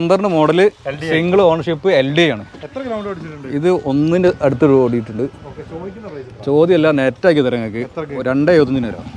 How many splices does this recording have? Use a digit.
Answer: 0